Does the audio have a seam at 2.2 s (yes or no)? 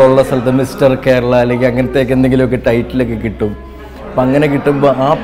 no